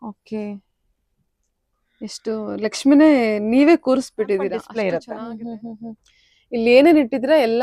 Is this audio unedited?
no; 1 cut; at 4.7 s

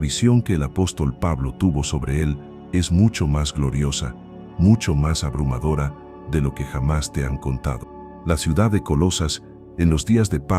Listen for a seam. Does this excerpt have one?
yes; 1 cut; at 7.9 s

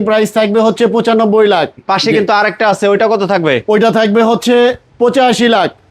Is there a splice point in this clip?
yes; 2 cuts; at 1.8 s, 4.9 s

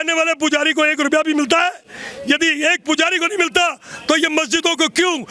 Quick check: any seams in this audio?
no; 0 cuts

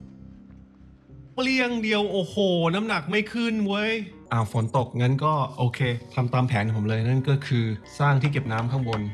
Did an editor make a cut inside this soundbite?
yes; 2 cuts; at 4.2 s, 7.9 s

